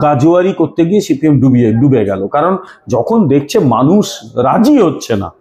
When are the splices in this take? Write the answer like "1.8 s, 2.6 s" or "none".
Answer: none